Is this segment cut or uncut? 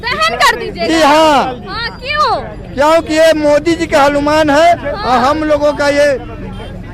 uncut